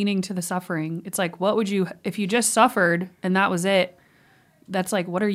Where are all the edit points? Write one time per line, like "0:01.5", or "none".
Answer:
none

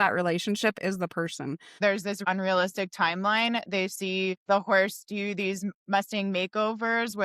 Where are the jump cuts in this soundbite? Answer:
0:02.0
0:04.4

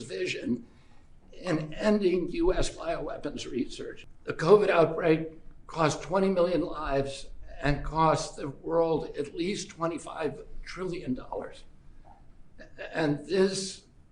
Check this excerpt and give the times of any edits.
0:03.9

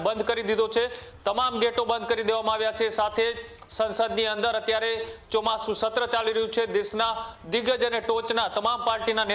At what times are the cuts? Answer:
none

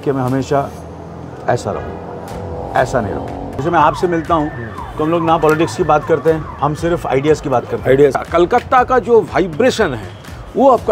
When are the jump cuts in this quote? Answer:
0:03.5
0:06.5
0:08.2

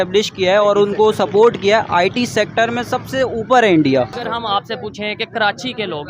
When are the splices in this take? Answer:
0:04.1

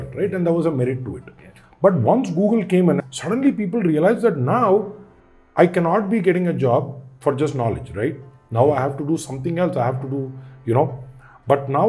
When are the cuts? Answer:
0:03.0

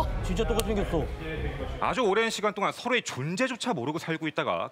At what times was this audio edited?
0:01.6

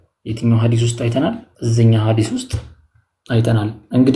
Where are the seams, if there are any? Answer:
0:01.5

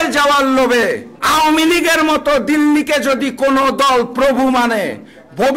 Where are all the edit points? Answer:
none

